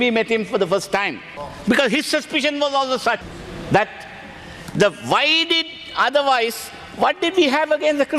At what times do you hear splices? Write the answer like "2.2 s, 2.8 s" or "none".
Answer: none